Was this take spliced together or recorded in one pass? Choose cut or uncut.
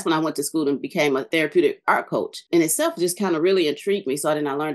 cut